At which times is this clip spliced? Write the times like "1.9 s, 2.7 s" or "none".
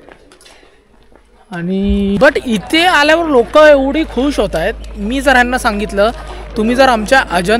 2.2 s